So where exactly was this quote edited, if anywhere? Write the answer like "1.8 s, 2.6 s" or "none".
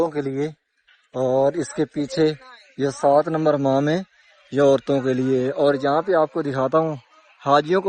none